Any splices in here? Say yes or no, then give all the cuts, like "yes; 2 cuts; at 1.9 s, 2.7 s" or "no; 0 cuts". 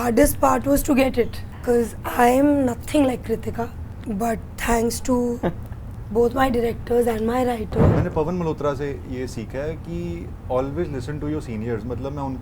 yes; 3 cuts; at 1.5 s, 3.9 s, 7.9 s